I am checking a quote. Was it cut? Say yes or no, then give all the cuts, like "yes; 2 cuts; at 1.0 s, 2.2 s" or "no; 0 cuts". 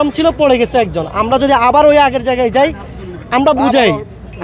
no; 0 cuts